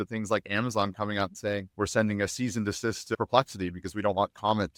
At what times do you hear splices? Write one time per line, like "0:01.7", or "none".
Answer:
none